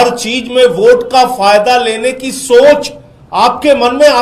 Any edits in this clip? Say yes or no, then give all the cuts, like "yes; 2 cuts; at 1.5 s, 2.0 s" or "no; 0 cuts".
no; 0 cuts